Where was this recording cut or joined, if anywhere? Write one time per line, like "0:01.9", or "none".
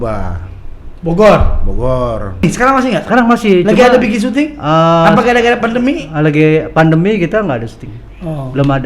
0:02.4